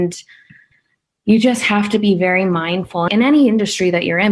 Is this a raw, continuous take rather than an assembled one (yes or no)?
no